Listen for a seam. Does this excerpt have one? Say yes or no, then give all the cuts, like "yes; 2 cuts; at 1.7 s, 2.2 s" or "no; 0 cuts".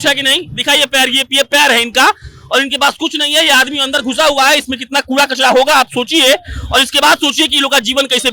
no; 0 cuts